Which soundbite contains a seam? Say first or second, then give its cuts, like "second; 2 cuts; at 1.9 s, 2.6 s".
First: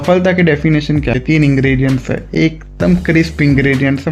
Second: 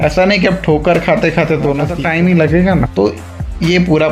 second; 1 cut; at 1.9 s